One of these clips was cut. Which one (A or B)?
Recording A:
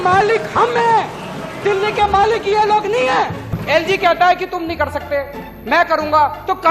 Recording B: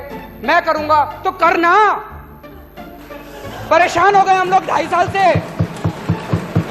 A